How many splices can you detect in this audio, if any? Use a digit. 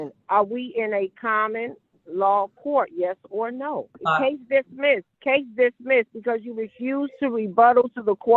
2